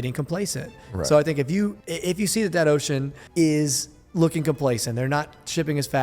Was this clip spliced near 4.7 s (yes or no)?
no